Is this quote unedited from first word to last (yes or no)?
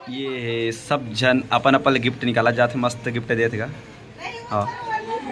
yes